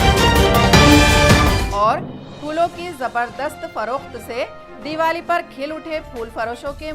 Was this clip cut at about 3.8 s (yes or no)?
no